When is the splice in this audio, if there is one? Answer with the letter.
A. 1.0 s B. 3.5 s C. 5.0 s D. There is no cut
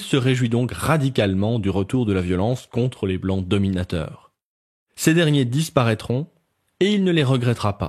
A